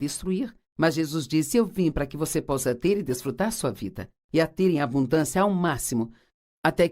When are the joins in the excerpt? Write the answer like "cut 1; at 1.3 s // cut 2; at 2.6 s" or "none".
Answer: cut 1; at 5.5 s